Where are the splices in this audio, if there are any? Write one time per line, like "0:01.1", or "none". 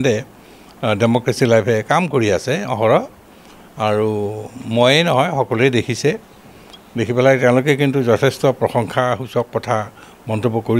none